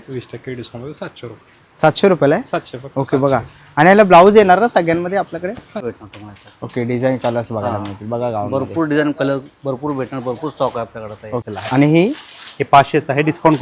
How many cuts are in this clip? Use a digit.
2